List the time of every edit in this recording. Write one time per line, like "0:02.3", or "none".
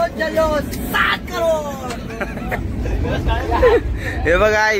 none